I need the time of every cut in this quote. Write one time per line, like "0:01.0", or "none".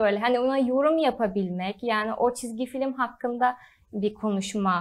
none